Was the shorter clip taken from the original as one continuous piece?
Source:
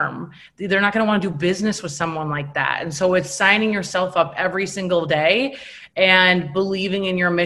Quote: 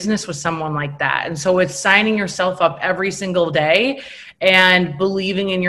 yes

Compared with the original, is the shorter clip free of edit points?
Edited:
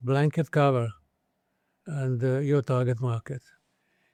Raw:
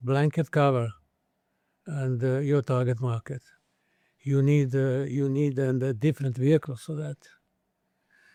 yes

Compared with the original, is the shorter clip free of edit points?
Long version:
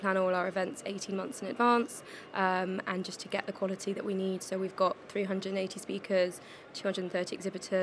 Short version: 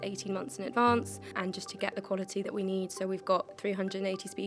no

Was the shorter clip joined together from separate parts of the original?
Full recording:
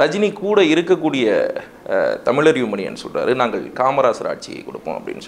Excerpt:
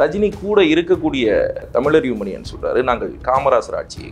yes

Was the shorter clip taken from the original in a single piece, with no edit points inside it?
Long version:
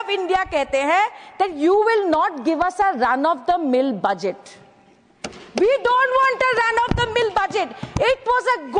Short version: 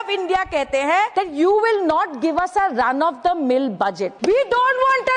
no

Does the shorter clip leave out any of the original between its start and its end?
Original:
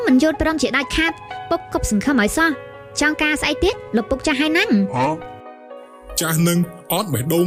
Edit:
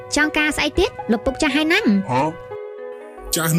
no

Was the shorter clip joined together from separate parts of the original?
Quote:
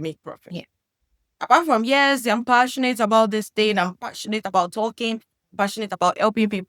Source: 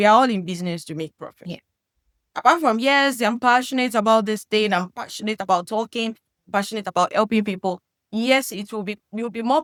no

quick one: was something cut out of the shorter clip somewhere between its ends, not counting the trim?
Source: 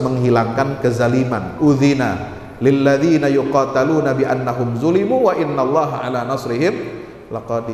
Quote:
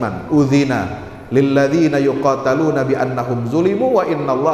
no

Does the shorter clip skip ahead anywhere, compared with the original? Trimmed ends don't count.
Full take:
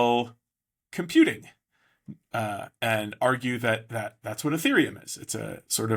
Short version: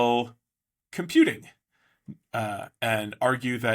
no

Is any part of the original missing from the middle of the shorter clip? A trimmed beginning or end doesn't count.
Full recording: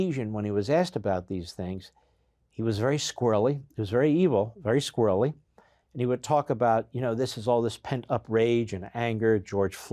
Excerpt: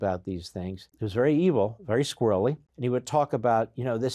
yes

